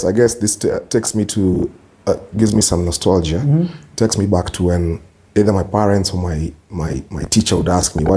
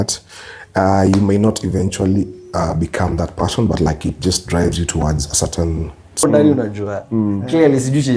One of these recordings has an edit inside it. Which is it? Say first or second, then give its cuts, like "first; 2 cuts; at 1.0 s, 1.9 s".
second; 1 cut; at 6.2 s